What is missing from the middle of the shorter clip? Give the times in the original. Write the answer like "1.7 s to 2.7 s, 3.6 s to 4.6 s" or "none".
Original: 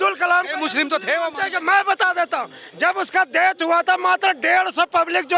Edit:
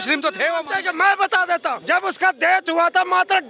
2.5 s to 2.7 s